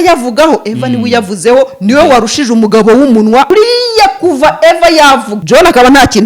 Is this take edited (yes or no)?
yes